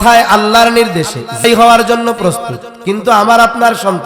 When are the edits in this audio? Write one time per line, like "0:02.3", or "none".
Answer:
0:01.4